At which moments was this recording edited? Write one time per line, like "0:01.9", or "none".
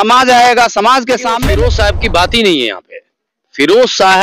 0:01.4